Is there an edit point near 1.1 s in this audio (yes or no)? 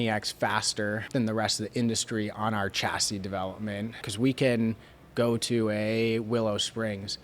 yes